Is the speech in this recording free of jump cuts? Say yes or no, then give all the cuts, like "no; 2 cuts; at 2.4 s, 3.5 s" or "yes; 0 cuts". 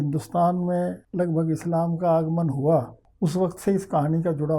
no; 2 cuts; at 1.0 s, 3.0 s